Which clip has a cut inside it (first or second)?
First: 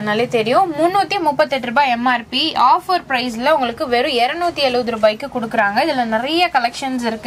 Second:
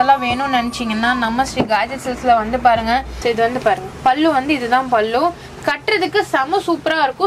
second